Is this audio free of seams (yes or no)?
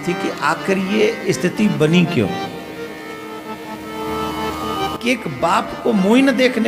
yes